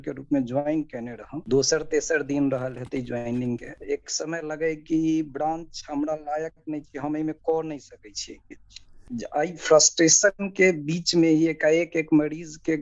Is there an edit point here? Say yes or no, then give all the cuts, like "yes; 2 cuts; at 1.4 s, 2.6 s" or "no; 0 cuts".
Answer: yes; 1 cut; at 9.0 s